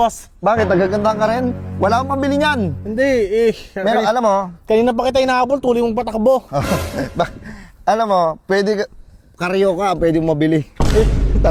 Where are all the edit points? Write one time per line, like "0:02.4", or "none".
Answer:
none